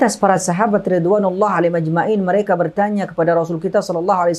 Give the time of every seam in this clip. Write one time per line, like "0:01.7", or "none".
none

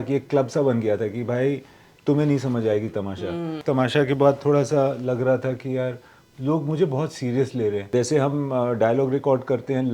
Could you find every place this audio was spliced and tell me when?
0:03.5
0:07.9

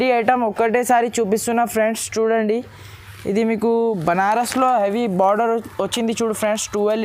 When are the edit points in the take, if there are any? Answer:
none

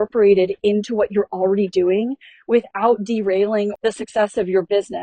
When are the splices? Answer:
0:03.7

